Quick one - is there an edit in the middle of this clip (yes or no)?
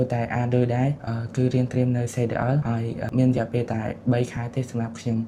no